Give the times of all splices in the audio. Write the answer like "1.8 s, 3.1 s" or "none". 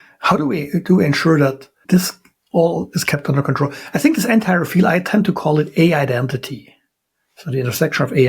1.7 s